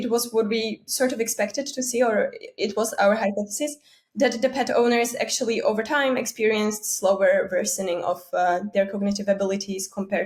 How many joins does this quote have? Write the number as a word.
zero